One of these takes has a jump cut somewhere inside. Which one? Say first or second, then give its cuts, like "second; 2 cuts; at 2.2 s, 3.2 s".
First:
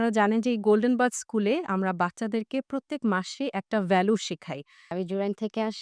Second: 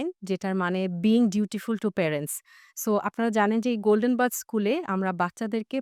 first; 1 cut; at 4.9 s